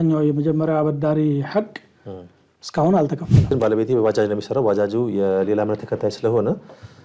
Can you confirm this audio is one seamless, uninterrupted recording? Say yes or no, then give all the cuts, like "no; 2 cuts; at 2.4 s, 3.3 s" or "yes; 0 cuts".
no; 1 cut; at 3.4 s